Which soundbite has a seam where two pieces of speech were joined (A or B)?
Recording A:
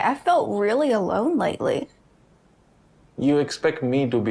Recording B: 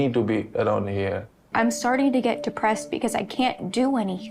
B